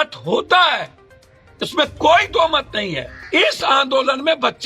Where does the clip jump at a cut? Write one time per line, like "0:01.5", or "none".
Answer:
0:03.2